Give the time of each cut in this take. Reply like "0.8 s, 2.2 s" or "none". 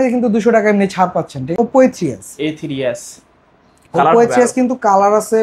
1.6 s

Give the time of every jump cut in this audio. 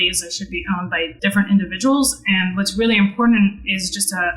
1.1 s

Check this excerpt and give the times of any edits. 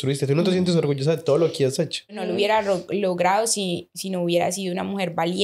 2.2 s

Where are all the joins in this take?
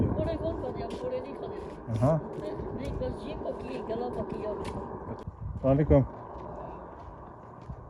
5.2 s

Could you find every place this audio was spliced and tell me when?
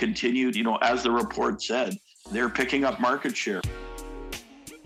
3.6 s

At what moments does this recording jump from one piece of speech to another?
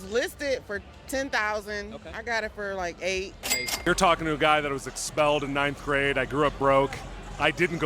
3.7 s

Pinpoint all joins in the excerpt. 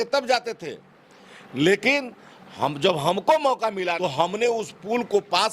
4.0 s

